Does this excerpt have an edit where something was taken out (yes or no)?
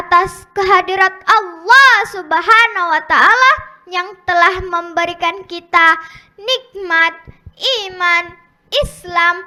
no